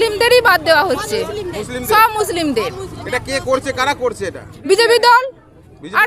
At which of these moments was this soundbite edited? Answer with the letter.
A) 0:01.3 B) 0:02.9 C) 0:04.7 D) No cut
D